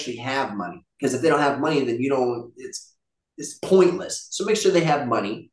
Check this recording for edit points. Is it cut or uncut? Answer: uncut